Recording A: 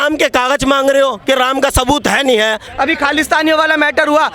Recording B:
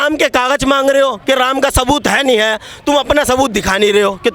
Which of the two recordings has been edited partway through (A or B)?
A